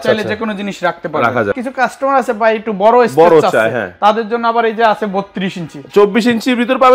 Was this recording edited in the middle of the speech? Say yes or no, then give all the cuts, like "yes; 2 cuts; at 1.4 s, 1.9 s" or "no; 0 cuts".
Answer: yes; 1 cut; at 1.6 s